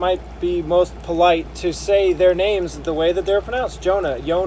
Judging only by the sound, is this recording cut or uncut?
uncut